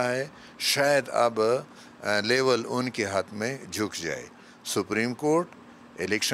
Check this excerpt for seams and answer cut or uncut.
cut